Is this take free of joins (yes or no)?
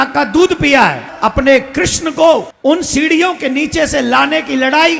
no